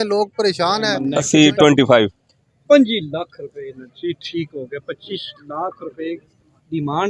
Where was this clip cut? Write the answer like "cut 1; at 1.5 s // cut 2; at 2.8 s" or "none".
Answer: cut 1; at 1.1 s